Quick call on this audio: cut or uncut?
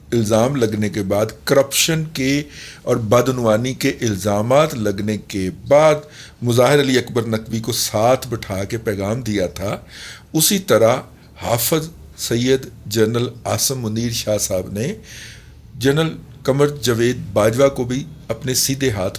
uncut